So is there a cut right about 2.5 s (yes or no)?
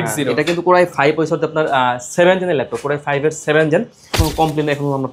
no